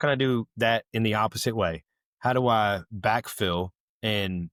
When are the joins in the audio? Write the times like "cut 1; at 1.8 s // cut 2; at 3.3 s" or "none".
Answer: none